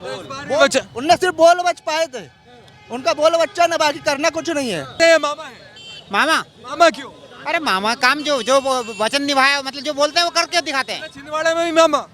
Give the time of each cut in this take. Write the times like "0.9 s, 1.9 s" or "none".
5.0 s